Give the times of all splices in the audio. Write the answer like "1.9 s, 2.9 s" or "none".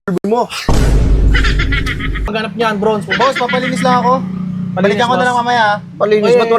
2.3 s